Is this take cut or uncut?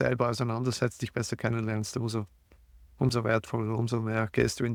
uncut